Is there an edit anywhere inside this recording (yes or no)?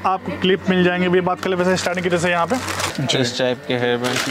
yes